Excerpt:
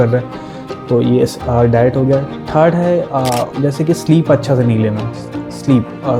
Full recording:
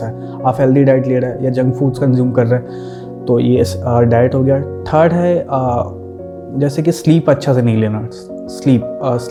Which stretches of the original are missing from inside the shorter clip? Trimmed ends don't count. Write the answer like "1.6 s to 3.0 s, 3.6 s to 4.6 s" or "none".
5.9 s to 6.5 s